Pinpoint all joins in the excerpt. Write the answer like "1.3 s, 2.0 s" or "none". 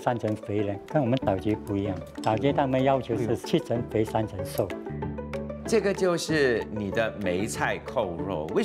5.3 s, 6.7 s